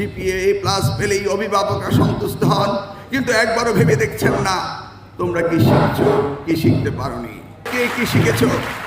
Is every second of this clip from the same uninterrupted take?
no; 1 cut; at 7.7 s

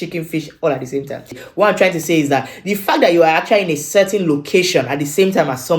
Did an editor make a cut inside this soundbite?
yes; 1 cut; at 1.4 s

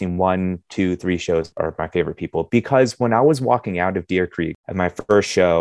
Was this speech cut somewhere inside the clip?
yes; 2 cuts; at 1.5 s, 4.6 s

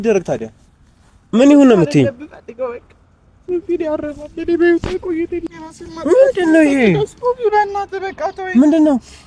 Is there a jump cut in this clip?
yes; 1 cut; at 5.5 s

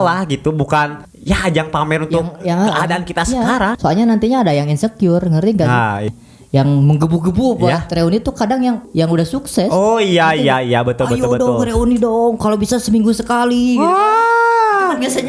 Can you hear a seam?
yes; 4 cuts; at 1.1 s, 3.8 s, 6.1 s, 8.8 s

